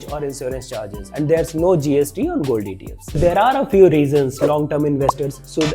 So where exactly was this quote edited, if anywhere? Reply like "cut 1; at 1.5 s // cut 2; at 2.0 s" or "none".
cut 1; at 1.1 s // cut 2; at 3.2 s

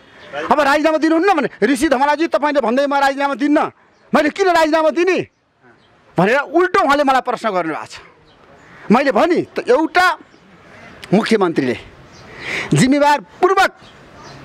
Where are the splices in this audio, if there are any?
none

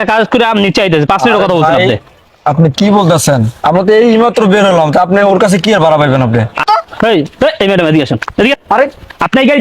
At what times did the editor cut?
cut 1; at 6.6 s

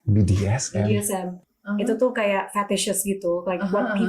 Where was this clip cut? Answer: cut 1; at 1.3 s

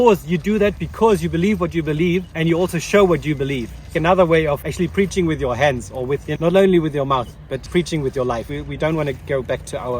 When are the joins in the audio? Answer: cut 1; at 2.3 s // cut 2; at 3.9 s // cut 3; at 4.7 s // cut 4; at 6.3 s // cut 5; at 7.6 s // cut 6; at 8.6 s

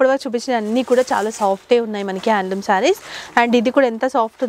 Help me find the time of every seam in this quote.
none

